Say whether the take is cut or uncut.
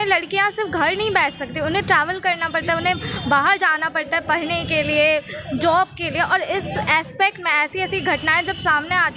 uncut